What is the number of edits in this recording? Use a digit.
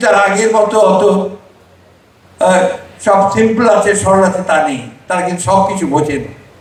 0